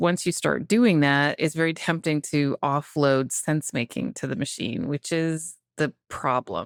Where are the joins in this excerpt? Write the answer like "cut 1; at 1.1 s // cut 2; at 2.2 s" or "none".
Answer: none